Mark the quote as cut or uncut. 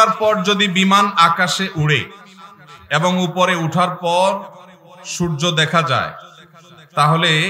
uncut